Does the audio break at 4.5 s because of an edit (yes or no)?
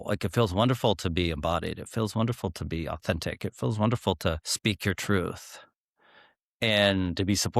yes